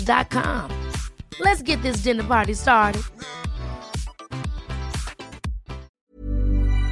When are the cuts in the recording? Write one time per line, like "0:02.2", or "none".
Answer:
0:05.9